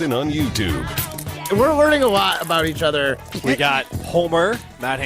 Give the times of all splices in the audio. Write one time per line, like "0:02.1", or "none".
0:01.4